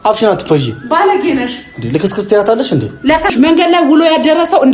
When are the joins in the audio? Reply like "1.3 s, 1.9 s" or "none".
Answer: 3.3 s

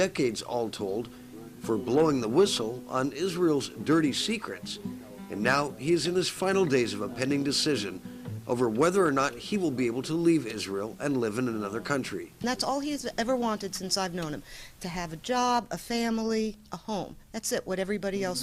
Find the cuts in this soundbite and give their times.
none

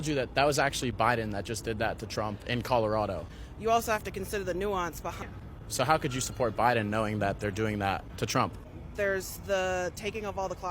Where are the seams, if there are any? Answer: 4.9 s

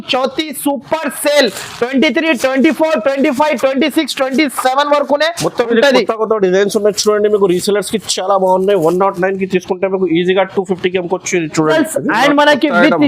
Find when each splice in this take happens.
11.7 s

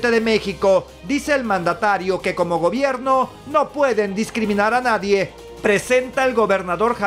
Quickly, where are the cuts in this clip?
5.5 s

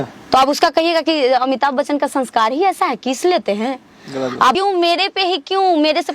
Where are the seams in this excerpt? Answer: 4.6 s

